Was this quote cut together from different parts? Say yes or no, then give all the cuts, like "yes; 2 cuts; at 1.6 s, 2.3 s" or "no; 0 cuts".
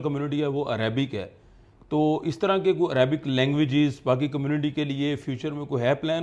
no; 0 cuts